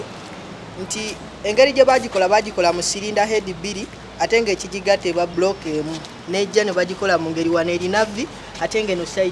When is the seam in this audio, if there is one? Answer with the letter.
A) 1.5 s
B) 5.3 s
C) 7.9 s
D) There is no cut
B